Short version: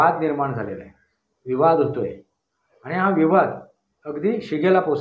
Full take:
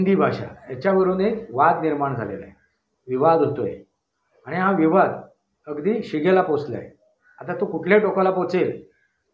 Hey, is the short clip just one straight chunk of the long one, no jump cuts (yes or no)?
yes